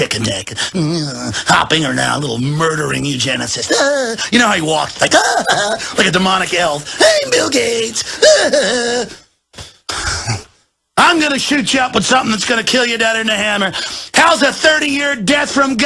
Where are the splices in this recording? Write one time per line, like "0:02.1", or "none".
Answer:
none